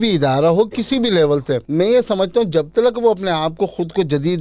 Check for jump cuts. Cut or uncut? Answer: cut